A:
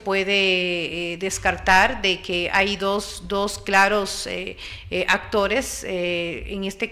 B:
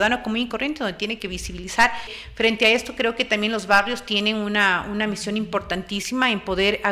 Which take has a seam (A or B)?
B